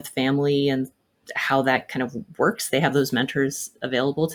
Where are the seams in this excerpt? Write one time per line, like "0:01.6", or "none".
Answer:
none